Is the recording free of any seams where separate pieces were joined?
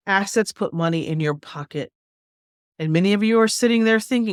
yes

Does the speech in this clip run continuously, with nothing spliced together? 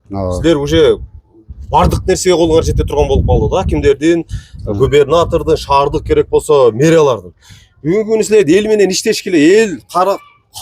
yes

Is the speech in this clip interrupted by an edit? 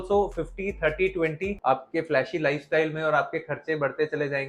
yes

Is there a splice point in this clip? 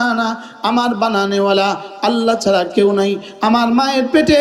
no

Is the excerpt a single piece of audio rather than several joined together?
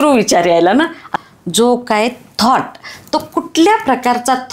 no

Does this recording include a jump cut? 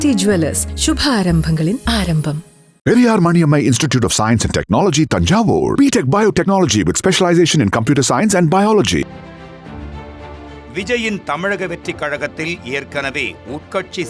yes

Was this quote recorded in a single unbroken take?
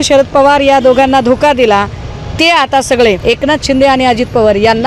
no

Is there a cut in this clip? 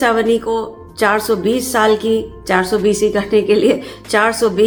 no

